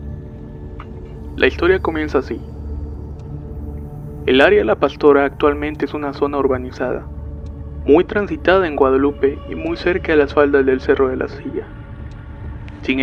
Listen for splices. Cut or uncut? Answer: uncut